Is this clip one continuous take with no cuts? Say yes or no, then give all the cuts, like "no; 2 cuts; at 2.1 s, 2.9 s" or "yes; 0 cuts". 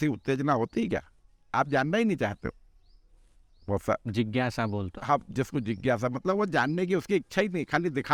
yes; 0 cuts